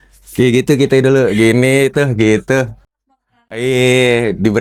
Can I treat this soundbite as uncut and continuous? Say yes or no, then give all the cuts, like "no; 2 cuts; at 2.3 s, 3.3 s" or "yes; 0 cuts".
yes; 0 cuts